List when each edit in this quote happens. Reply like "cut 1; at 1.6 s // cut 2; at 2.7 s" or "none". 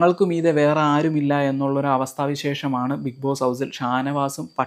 none